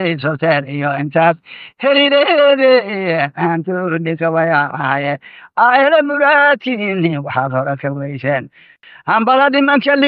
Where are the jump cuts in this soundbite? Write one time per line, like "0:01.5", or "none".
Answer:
0:08.8

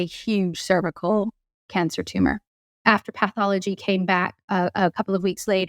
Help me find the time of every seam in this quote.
0:02.7

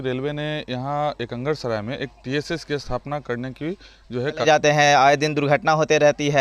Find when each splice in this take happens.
0:04.4

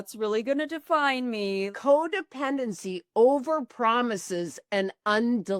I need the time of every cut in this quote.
0:01.7

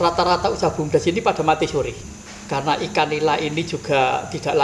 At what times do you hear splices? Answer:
0:02.0

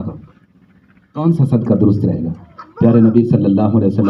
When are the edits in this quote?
none

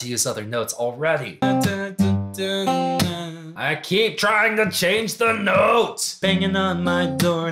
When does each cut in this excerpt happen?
0:01.4
0:06.1

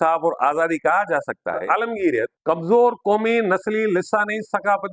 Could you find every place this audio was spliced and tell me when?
0:01.6
0:02.4

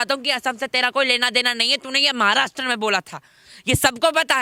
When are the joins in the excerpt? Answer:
none

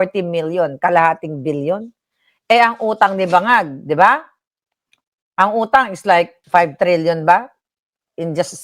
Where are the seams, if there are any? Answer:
0:06.4

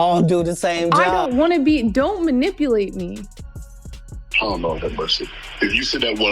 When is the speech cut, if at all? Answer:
0:01.1

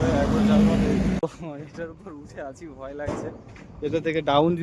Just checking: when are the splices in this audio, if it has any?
0:01.2

